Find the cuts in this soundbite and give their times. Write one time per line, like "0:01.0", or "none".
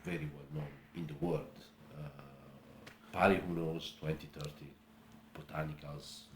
0:03.1